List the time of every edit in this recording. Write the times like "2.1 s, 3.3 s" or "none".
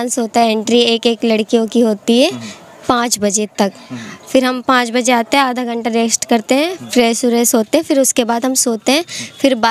none